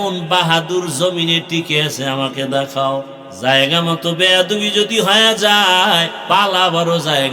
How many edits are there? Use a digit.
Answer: 2